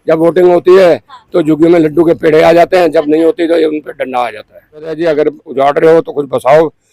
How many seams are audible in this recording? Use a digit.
1